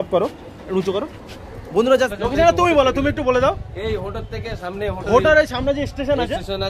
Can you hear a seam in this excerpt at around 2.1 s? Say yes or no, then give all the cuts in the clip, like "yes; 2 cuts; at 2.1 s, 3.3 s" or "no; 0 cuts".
yes; 1 cut; at 2.1 s